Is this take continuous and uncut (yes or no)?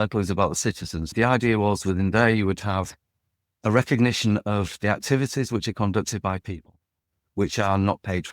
no